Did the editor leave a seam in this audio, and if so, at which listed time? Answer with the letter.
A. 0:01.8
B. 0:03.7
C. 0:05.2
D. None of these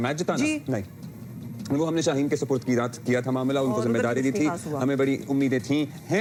D